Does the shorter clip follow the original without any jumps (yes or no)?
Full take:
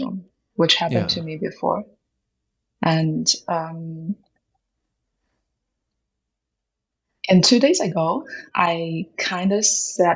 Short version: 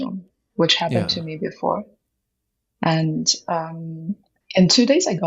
no